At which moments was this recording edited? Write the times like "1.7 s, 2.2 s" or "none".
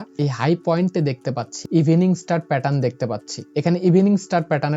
1.5 s, 3.4 s